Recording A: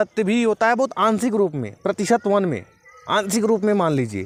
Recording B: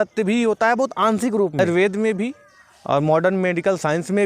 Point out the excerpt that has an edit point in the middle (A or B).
B